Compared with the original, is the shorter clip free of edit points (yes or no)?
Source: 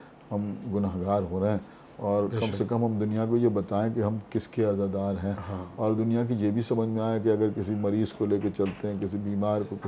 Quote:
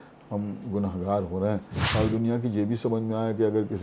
no